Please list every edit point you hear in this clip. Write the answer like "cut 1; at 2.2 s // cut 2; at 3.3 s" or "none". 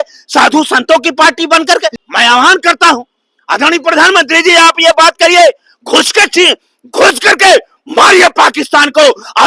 cut 1; at 2.0 s